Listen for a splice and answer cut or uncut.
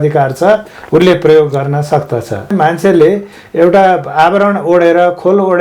cut